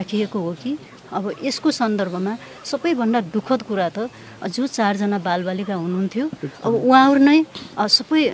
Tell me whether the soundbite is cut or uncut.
uncut